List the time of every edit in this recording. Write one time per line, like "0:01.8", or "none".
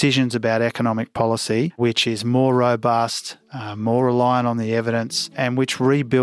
0:01.8
0:05.2